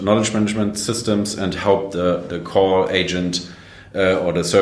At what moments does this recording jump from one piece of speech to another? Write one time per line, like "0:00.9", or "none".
none